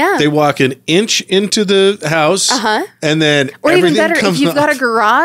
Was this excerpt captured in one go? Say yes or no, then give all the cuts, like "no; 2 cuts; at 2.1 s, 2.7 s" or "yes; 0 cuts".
yes; 0 cuts